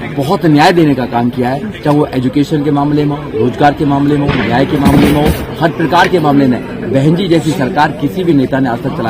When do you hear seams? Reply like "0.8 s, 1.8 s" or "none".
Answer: none